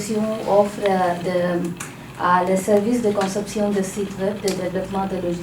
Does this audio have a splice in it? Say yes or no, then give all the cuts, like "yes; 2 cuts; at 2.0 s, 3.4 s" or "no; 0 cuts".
no; 0 cuts